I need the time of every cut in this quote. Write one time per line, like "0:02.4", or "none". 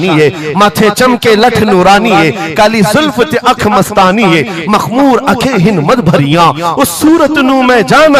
none